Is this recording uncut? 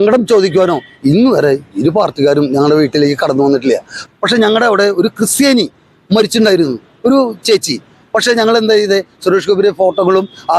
no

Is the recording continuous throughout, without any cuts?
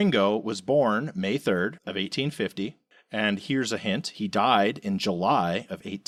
yes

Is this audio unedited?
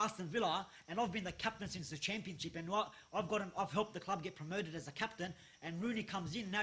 yes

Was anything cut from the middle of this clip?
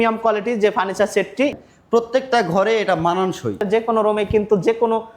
yes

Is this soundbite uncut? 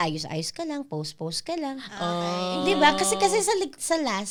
yes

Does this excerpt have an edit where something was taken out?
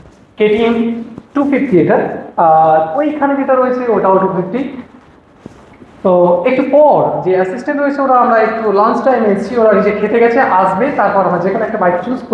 no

